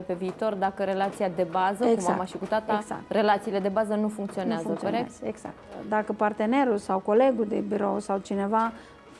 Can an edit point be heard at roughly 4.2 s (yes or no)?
no